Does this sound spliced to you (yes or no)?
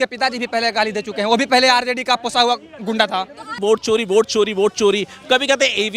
yes